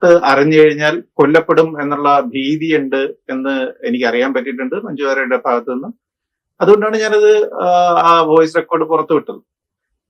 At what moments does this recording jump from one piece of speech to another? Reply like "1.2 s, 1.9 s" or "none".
none